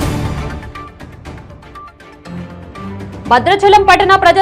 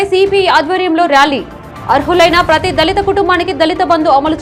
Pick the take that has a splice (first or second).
first